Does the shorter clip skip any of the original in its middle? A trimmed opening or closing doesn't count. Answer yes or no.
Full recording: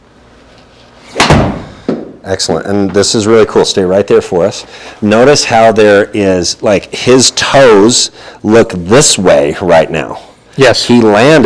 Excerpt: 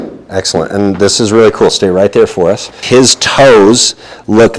yes